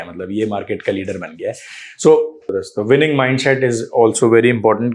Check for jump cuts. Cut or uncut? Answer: cut